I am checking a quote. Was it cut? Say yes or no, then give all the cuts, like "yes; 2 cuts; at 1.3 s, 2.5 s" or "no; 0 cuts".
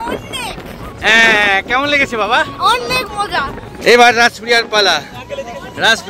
no; 0 cuts